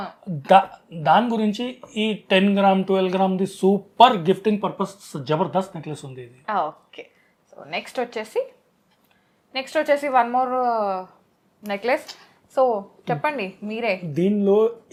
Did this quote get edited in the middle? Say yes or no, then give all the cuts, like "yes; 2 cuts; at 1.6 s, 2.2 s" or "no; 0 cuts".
no; 0 cuts